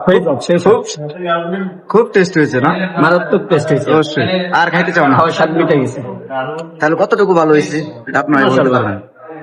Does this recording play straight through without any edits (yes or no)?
yes